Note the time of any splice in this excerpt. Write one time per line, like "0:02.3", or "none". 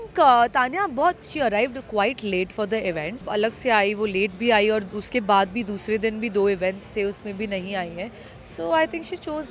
0:03.2